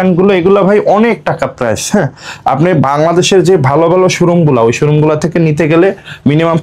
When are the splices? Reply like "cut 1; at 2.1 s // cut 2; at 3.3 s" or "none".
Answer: none